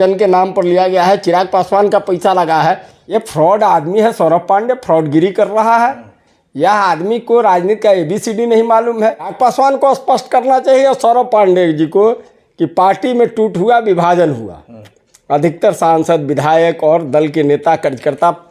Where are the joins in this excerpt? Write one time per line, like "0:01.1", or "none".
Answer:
0:02.9
0:09.3